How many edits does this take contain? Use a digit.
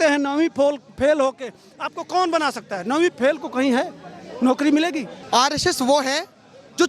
1